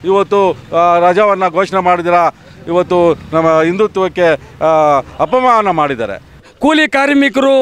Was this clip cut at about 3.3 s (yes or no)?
no